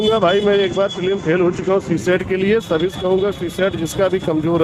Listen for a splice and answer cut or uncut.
uncut